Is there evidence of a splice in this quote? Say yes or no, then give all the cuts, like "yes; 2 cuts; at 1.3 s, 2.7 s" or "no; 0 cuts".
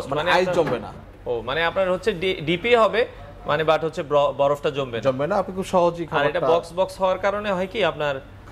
no; 0 cuts